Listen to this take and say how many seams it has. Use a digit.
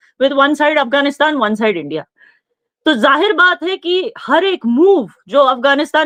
0